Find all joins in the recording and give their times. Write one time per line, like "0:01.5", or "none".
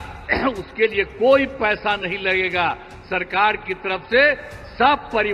none